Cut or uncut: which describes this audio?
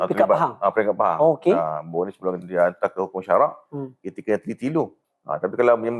cut